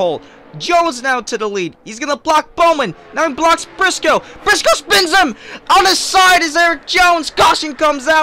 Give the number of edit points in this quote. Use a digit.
0